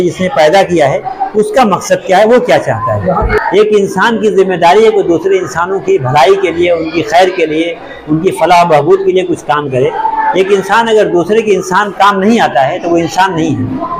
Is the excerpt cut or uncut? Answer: cut